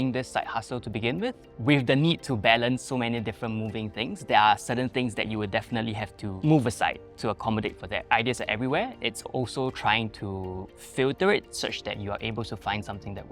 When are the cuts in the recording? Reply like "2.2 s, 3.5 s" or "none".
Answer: 1.5 s, 6.3 s, 8.0 s